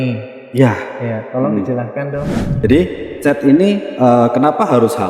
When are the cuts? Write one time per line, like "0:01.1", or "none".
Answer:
0:02.4

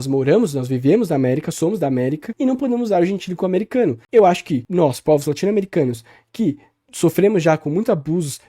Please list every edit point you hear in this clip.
0:02.3
0:04.0
0:04.6

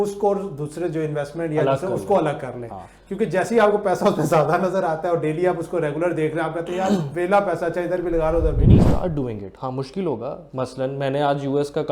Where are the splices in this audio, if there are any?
0:08.8

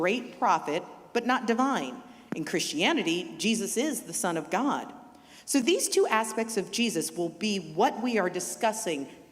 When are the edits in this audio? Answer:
none

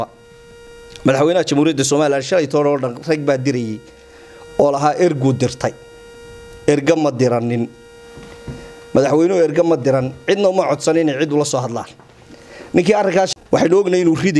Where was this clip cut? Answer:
0:13.3

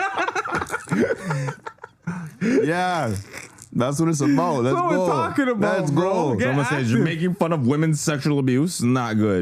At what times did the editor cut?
none

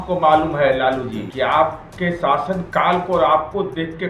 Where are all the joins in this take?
0:01.3
0:01.9

